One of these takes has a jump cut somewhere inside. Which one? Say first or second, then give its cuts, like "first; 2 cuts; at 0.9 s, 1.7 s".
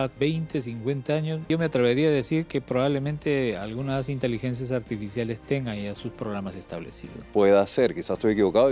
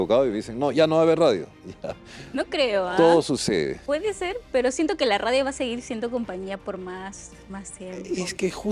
first; 2 cuts; at 1.5 s, 7.1 s